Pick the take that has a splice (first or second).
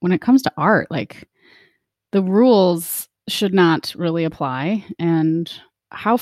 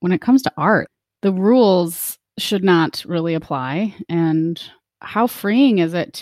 second